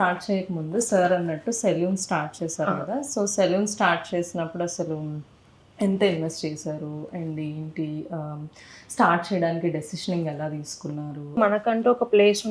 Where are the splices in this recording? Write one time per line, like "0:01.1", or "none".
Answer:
0:11.4